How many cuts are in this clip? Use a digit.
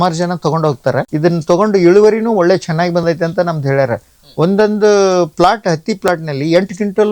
1